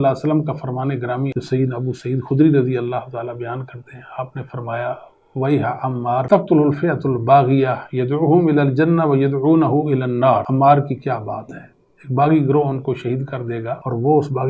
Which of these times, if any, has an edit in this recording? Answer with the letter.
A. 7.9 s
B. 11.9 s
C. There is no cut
C